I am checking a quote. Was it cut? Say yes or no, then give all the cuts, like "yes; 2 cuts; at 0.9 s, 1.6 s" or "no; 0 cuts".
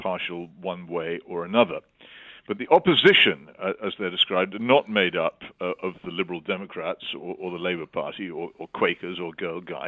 no; 0 cuts